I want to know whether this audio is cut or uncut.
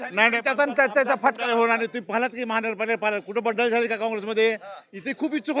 uncut